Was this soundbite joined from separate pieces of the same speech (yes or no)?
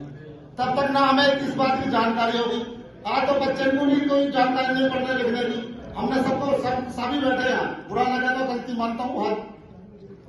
no